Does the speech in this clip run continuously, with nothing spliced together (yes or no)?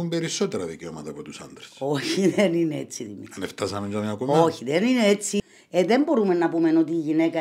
no